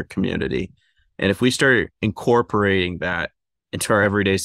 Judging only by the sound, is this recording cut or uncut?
uncut